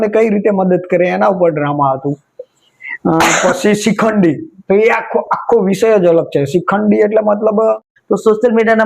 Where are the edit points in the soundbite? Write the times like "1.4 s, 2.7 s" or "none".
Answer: 7.9 s